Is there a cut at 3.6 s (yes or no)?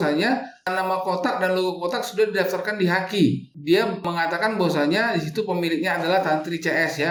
no